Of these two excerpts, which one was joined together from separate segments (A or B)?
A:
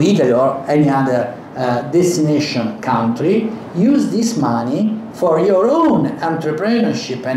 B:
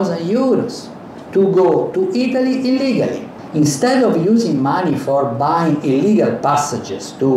B